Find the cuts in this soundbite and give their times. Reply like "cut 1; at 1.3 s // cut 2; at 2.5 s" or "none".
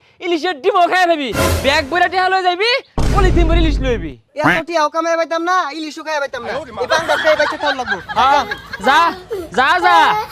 none